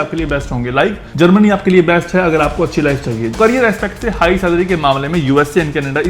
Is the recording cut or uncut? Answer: cut